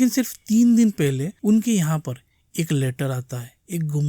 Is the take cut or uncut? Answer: cut